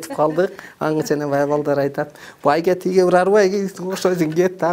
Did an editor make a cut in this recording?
no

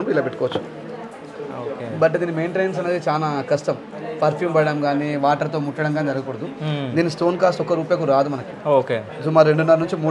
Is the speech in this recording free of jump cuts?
yes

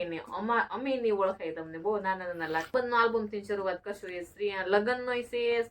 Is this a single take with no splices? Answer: no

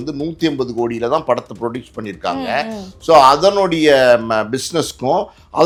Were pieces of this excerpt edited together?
no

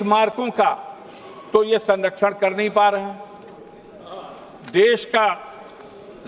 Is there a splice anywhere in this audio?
no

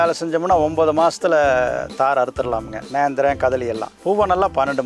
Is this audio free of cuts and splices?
no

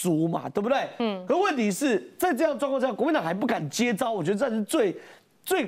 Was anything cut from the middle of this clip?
no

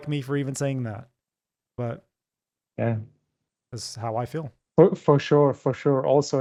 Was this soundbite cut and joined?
no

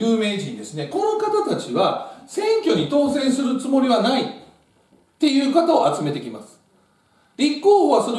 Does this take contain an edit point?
no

